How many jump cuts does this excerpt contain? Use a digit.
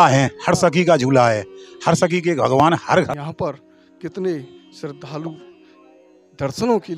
1